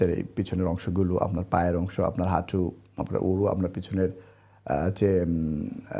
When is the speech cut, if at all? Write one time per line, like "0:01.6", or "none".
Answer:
none